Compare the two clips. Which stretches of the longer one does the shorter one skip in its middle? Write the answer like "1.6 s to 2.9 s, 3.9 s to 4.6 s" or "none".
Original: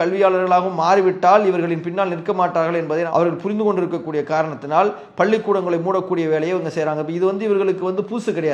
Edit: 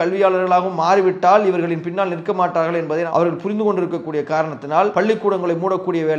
4.9 s to 5.2 s